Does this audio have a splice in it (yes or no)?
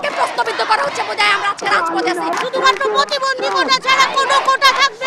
no